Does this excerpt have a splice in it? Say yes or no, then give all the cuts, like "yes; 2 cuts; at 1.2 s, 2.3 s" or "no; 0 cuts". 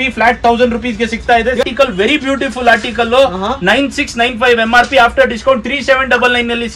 yes; 1 cut; at 1.6 s